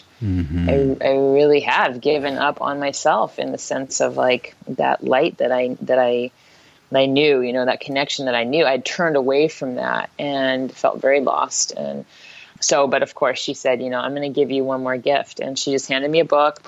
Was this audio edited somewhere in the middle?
yes; 1 cut; at 12.5 s

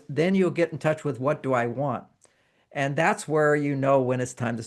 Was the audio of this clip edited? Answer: no; 0 cuts

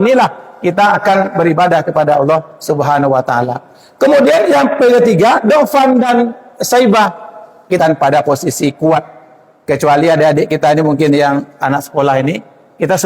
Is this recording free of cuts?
no; 1 cut; at 7.8 s

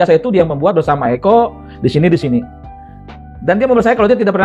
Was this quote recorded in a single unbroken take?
yes; 0 cuts

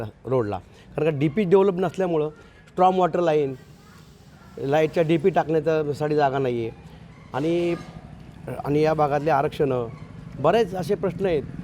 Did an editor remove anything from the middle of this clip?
no; 0 cuts

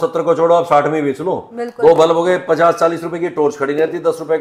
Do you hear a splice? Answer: no; 0 cuts

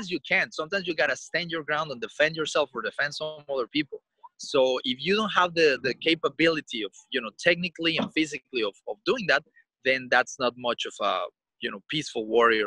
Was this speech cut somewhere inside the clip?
no; 0 cuts

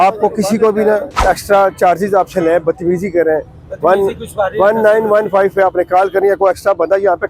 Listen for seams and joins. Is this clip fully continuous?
no; 1 cut; at 1.2 s

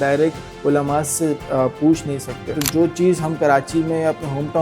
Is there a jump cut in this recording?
yes; 1 cut; at 2.6 s

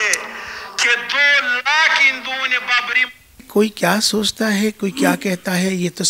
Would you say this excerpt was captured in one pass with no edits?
no; 1 cut; at 3.5 s

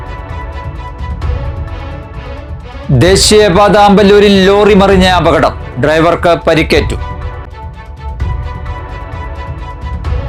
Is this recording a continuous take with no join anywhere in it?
yes; 0 cuts

